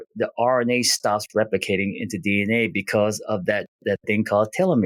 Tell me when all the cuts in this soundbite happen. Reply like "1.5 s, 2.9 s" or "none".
none